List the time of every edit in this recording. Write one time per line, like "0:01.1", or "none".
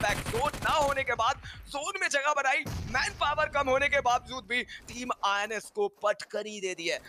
none